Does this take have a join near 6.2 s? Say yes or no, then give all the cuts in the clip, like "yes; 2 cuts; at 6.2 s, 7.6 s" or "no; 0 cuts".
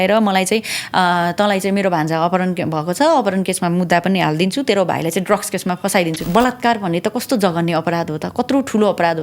yes; 1 cut; at 6.2 s